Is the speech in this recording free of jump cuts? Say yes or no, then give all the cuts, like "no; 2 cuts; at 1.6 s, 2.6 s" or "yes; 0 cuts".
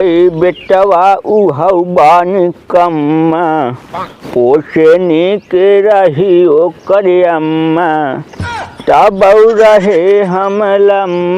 yes; 0 cuts